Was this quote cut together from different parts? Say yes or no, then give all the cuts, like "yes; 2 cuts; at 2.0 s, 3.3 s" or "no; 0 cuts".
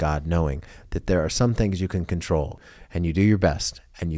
yes; 1 cut; at 2.7 s